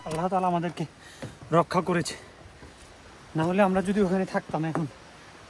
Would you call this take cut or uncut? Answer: uncut